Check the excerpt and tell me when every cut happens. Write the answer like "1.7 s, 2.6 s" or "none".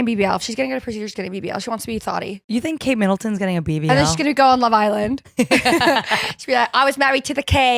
2.4 s, 5.2 s